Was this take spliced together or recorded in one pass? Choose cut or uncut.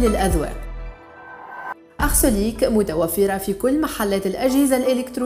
uncut